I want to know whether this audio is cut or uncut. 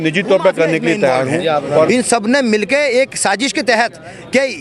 cut